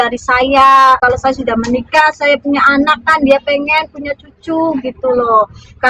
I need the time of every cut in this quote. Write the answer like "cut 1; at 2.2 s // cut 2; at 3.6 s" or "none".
cut 1; at 1.0 s